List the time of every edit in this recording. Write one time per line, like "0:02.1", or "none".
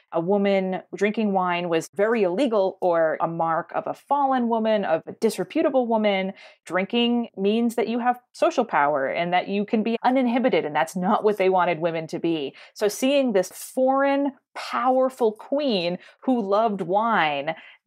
0:01.9
0:06.6
0:09.9
0:13.5